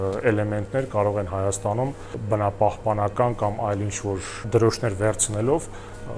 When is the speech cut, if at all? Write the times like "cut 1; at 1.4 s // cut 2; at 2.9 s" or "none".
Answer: cut 1; at 2.2 s // cut 2; at 4.3 s